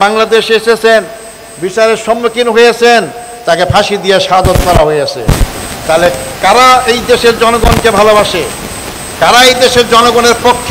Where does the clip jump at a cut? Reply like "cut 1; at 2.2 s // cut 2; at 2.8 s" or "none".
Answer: none